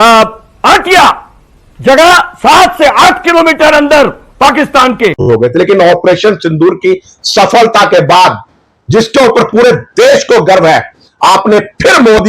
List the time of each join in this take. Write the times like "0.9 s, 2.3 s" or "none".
5.2 s